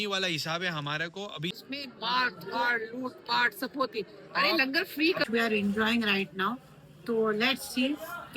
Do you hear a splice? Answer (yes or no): yes